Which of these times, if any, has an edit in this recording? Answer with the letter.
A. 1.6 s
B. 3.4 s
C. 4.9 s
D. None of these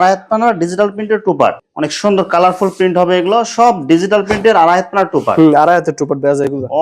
A